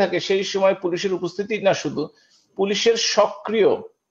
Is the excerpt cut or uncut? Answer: uncut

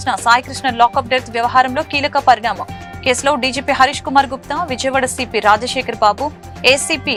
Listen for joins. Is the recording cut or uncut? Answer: uncut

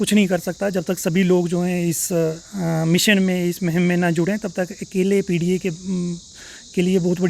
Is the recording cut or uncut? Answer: uncut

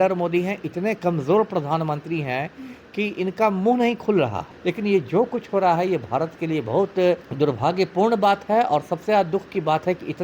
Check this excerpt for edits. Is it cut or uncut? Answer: cut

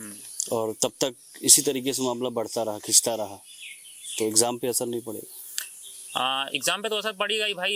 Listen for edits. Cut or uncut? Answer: uncut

